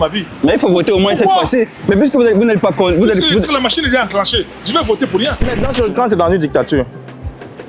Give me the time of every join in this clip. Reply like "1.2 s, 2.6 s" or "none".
5.4 s